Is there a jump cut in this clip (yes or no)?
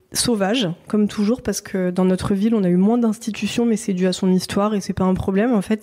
no